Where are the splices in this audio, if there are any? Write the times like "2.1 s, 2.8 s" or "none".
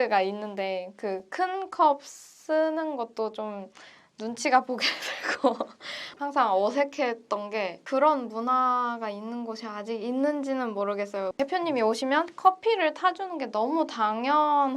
6.1 s, 11.3 s